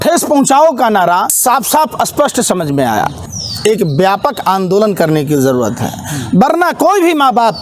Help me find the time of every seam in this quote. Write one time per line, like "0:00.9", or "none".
0:01.3
0:03.2